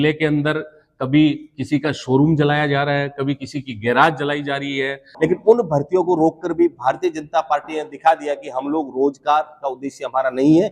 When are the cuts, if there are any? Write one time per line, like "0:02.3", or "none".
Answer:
0:05.0